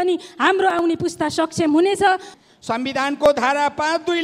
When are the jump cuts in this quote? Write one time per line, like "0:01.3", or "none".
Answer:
0:02.3

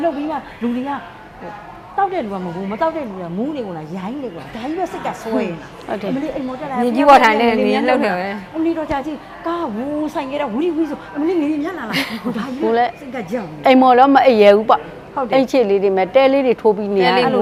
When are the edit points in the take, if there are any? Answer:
none

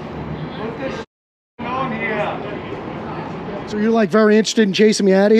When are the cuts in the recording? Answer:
0:03.8

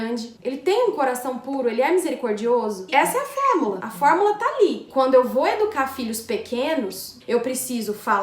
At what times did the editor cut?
0:04.8

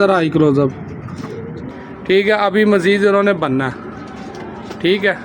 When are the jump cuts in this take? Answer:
0:01.5

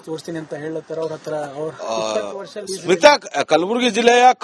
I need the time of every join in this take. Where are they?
0:01.2

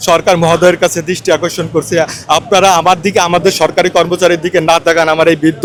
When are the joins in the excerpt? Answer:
none

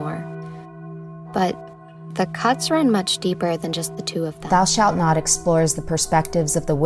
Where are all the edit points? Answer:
0:04.4

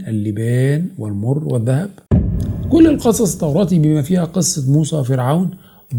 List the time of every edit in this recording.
none

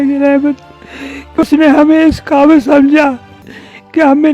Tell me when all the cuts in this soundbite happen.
0:01.4

